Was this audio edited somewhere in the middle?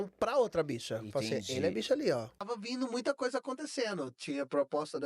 yes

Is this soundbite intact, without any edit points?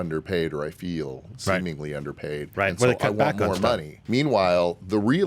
no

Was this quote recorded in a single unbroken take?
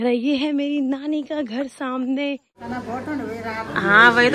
no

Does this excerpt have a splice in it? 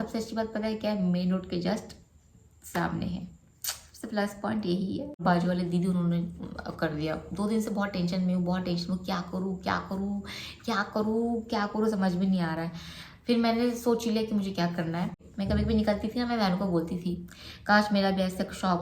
yes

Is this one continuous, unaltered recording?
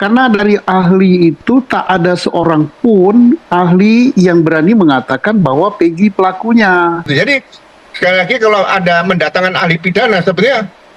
no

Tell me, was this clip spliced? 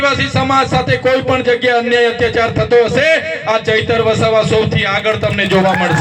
no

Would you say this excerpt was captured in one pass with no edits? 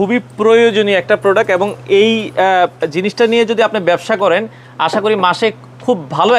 yes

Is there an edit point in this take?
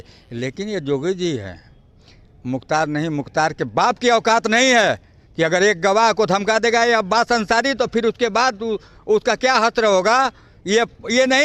no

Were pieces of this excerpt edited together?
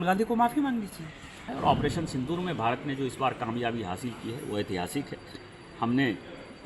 yes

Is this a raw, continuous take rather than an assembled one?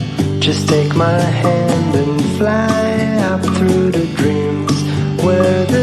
yes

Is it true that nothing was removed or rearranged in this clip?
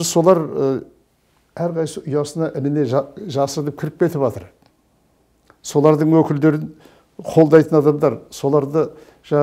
yes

